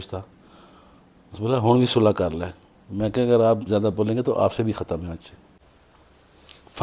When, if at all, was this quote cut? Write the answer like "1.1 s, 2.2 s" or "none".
5.6 s